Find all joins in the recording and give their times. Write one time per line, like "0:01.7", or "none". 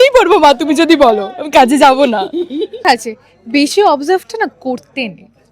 0:02.8